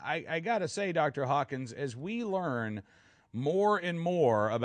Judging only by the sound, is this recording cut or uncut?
cut